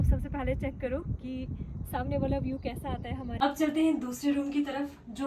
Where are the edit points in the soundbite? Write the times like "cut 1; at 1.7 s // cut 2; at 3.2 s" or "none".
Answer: cut 1; at 3.3 s